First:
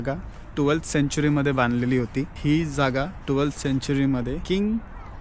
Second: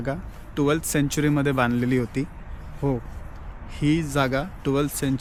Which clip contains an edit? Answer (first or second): first